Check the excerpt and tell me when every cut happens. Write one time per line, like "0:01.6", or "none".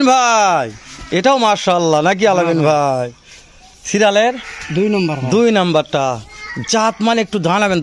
none